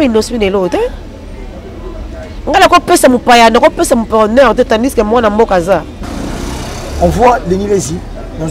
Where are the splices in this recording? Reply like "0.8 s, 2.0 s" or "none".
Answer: 5.9 s